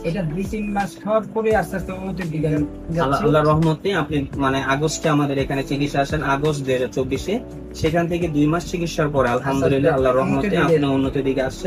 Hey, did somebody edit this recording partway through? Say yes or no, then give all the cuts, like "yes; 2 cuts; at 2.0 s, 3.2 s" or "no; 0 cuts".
no; 0 cuts